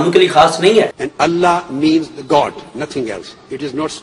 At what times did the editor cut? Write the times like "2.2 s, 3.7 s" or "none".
0.9 s

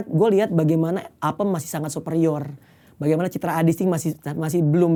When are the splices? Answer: none

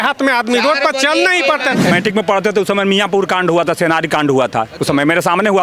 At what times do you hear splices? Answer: 1.9 s

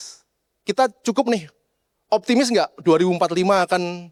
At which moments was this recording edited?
none

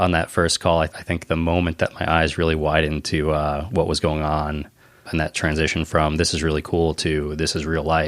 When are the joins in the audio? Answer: 1.0 s

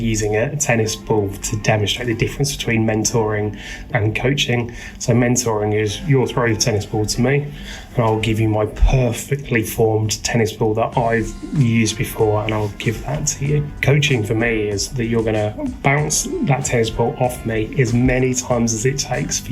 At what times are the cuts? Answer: 3.9 s, 13.7 s

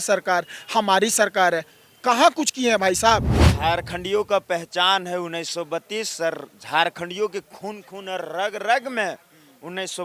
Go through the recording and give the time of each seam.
3.4 s

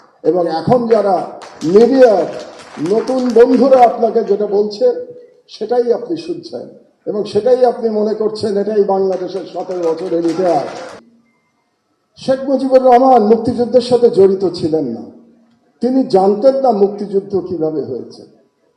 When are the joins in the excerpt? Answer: 11.0 s

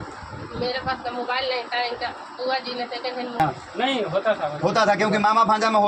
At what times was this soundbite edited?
3.4 s

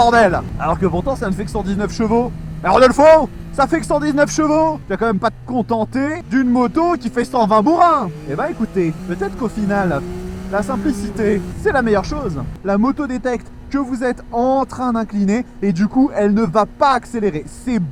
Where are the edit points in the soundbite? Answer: 4.8 s, 6.2 s, 9.0 s, 12.5 s

